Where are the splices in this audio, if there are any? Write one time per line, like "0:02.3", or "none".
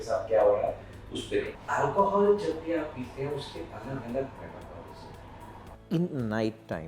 0:01.6
0:05.7